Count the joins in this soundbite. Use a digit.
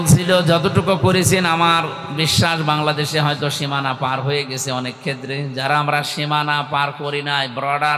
0